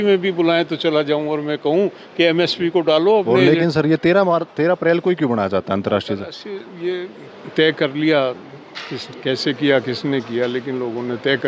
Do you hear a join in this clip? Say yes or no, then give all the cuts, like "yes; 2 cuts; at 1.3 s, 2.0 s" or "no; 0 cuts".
yes; 1 cut; at 3.4 s